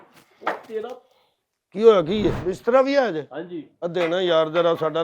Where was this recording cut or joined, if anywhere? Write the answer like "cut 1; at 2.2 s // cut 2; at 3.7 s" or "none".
cut 1; at 2.4 s